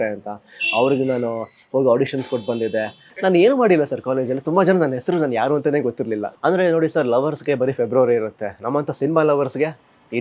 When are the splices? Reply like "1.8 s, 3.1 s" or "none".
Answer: 3.0 s, 6.3 s